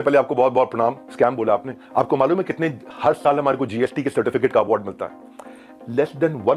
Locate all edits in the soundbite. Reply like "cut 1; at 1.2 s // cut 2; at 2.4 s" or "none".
cut 1; at 1.0 s